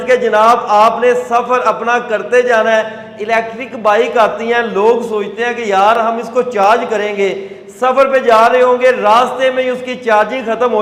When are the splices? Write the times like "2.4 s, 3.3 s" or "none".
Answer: none